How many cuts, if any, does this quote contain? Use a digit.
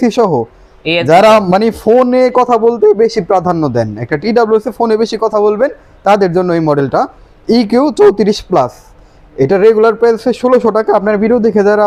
0